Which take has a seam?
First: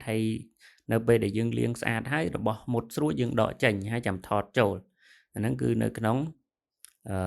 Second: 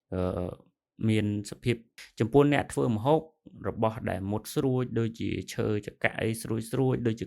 second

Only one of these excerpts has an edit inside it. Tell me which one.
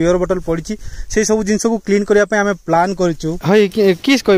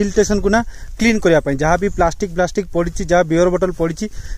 first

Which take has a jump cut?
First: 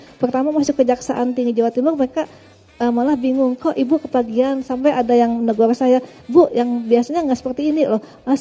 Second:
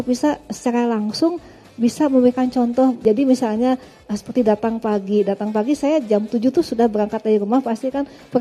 second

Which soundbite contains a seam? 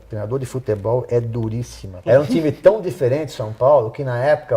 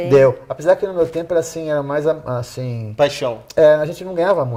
first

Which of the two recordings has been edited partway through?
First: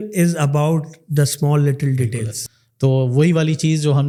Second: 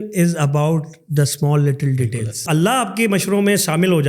second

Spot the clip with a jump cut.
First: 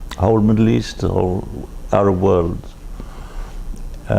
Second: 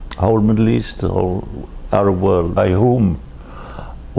first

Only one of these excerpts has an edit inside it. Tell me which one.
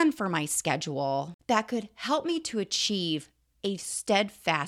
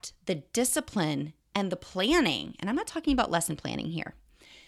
first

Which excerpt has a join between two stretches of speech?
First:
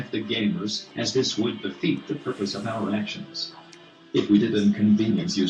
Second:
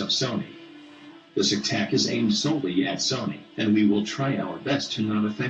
second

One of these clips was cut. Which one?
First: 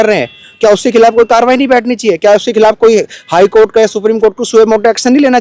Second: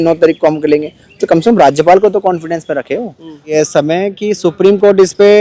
second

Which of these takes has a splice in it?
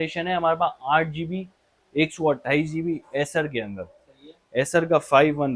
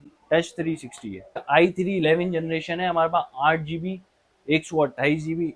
second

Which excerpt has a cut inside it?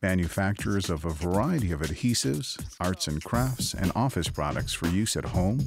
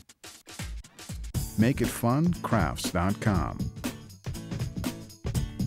second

